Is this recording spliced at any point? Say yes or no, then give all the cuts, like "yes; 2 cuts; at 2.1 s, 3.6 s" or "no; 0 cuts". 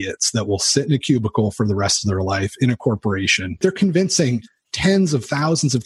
yes; 1 cut; at 3.6 s